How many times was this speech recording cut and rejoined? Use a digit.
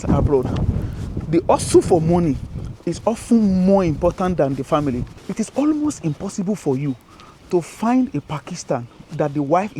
1